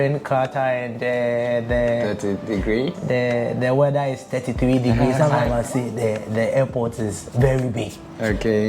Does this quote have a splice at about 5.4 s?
yes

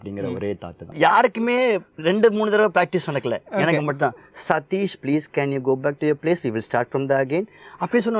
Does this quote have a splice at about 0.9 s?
yes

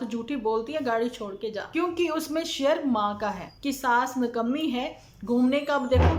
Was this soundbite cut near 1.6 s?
yes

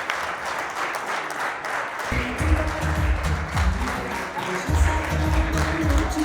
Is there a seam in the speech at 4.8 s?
no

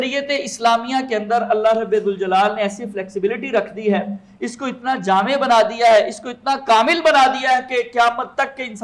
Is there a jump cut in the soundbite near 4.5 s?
no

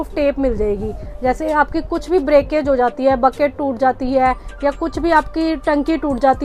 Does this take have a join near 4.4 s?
no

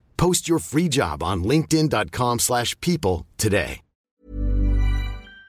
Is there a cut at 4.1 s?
yes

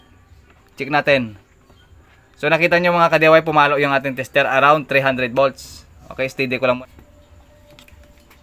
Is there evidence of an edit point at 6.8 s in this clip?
yes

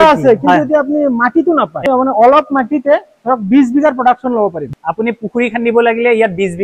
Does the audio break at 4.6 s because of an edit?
yes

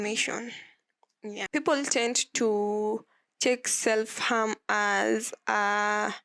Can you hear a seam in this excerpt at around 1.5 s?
yes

